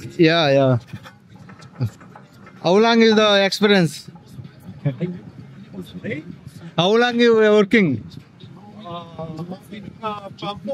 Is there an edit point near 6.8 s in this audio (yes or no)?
no